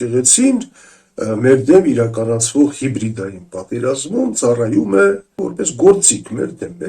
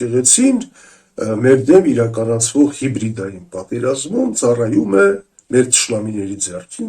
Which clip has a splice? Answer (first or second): first